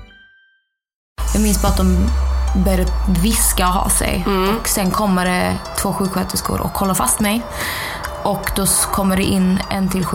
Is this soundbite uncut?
no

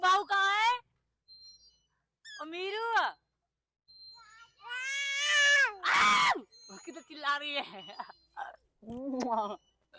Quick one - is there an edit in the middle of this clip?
no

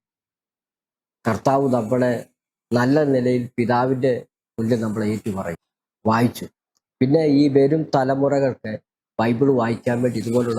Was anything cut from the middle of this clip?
yes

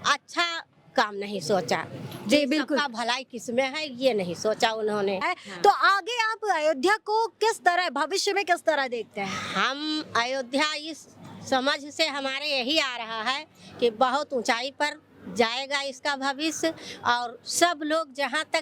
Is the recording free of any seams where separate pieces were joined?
yes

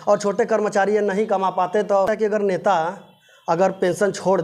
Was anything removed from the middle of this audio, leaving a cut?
yes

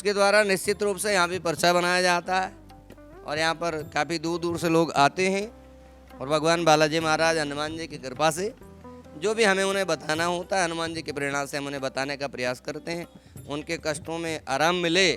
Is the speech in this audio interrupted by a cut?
no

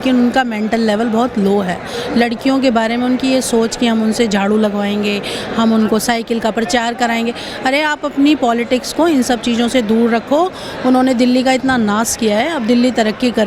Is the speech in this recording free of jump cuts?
yes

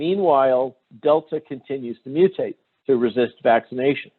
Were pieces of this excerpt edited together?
yes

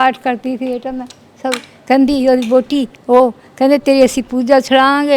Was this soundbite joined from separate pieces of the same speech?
no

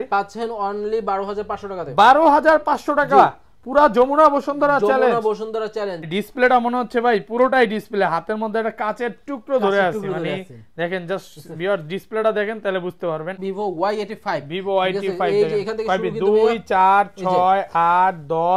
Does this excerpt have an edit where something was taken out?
yes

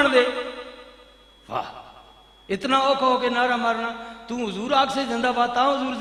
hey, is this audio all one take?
yes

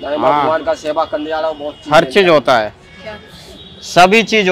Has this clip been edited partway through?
no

